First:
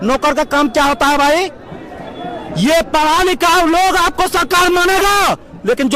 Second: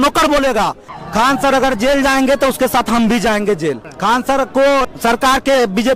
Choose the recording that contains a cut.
second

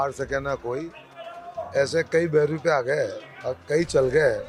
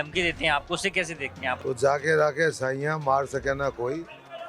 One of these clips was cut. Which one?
second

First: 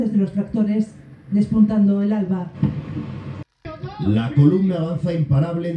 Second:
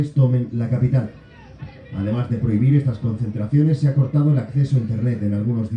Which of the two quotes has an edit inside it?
first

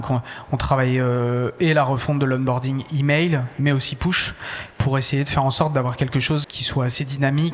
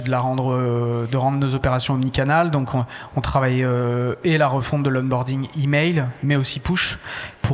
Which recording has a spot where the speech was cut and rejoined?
first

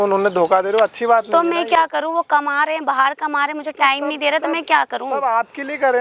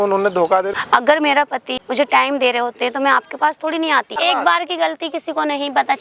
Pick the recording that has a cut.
second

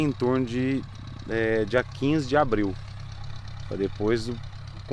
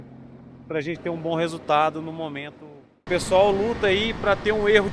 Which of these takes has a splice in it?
second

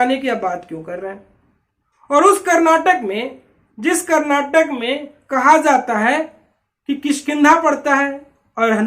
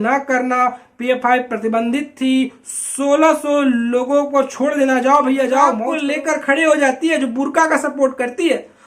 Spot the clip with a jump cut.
second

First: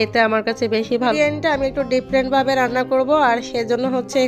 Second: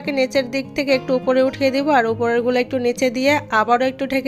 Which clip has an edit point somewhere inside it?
first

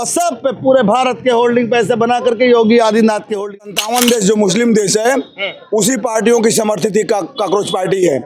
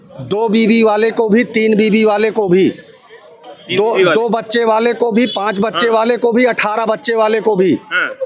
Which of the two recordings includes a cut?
first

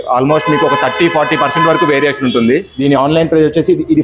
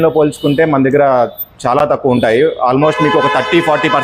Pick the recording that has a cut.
first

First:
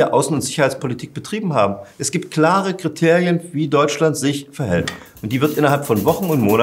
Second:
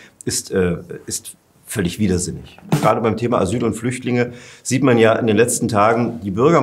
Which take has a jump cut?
second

